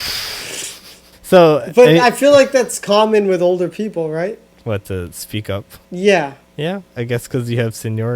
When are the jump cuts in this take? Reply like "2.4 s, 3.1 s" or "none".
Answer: 1.1 s, 4.5 s, 5.8 s, 6.4 s